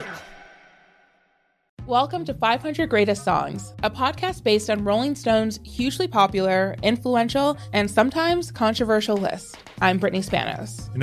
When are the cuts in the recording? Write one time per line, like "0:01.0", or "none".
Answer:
0:01.6